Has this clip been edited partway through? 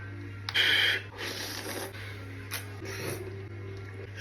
no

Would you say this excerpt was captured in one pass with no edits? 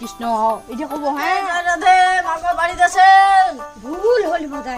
no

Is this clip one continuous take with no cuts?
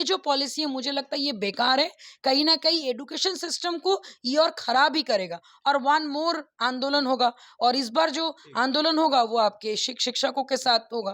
yes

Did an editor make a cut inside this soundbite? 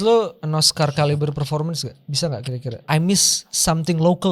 yes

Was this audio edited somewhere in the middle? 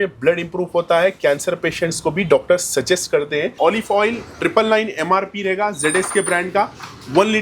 yes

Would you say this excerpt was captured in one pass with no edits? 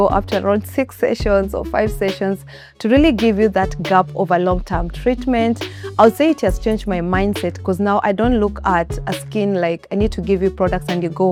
yes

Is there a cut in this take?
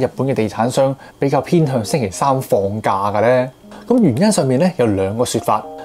no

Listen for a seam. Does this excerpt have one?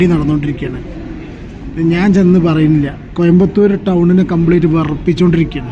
no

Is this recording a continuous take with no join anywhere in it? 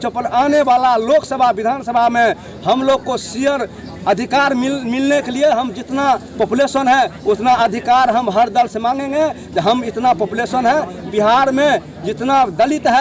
yes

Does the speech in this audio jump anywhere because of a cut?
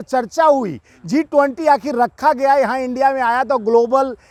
no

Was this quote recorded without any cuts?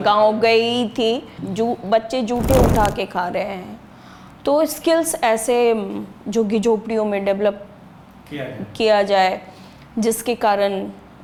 yes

